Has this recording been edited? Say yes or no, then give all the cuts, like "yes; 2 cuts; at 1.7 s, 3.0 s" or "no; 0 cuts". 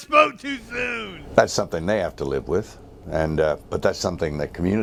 no; 0 cuts